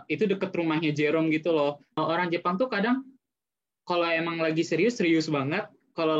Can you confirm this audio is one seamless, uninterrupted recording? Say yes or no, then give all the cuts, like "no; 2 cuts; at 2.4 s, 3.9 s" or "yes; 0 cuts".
no; 1 cut; at 2.0 s